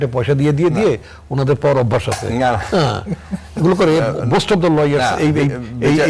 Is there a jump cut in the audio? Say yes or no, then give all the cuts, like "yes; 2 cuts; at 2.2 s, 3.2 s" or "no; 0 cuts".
no; 0 cuts